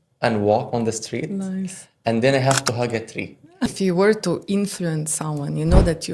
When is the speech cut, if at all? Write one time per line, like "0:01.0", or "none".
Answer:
0:03.7